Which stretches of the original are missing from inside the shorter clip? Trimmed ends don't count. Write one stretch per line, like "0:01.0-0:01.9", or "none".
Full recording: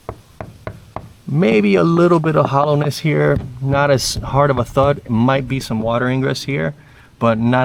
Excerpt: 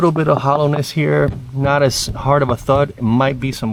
none

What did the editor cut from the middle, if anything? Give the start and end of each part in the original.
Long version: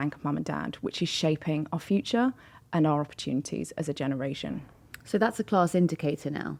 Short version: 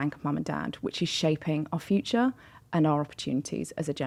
none

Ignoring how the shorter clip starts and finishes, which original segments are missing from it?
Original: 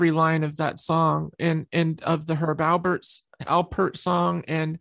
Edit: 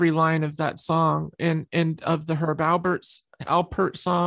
none

